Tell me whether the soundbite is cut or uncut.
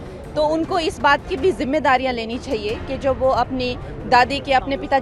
uncut